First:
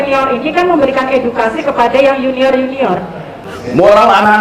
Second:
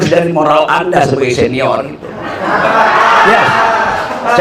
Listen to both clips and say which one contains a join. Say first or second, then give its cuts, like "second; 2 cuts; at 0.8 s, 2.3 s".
first; 1 cut; at 3.4 s